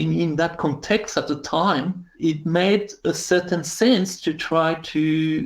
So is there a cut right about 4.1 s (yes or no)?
no